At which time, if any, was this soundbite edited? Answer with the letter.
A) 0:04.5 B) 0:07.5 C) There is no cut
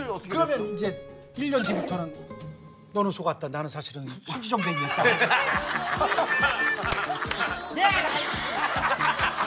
B